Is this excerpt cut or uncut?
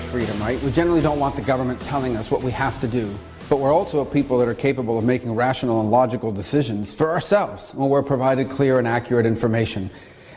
uncut